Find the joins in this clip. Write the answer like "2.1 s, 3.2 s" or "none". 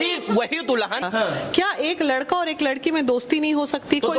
1.0 s